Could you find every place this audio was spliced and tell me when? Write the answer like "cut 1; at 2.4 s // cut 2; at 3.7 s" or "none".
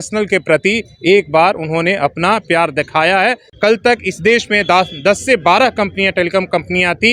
cut 1; at 3.5 s

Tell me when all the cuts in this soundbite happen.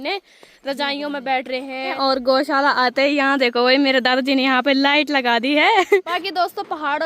cut 1; at 1.9 s // cut 2; at 6.1 s

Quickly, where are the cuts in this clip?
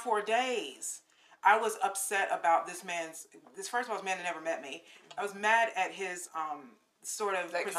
none

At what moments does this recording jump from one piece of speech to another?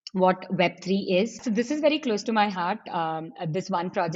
cut 1; at 1.4 s

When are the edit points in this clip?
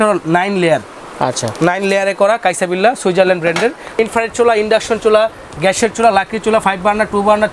cut 1; at 4.0 s

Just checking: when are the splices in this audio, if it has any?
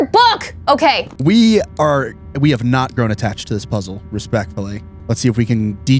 cut 1; at 1.1 s // cut 2; at 4.9 s

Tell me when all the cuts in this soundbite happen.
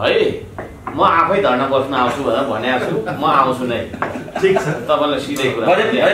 none

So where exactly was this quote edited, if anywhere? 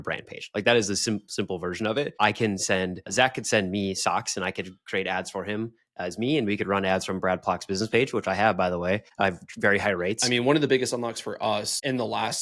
cut 1; at 10.2 s

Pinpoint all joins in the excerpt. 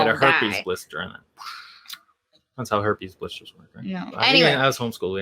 cut 1; at 4.1 s

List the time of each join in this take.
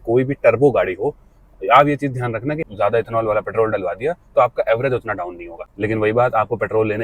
cut 1; at 2.7 s // cut 2; at 5.7 s

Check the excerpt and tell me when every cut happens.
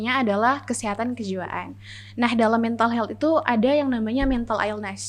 none

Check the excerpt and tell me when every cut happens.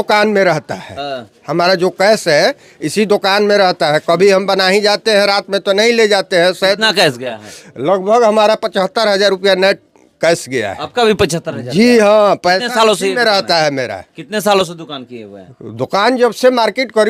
none

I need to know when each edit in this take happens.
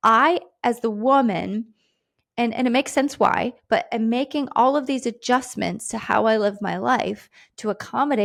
none

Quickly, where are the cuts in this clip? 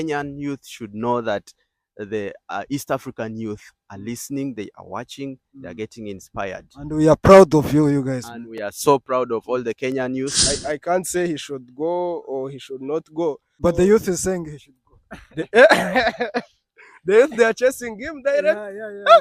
cut 1; at 10.4 s // cut 2; at 13.6 s

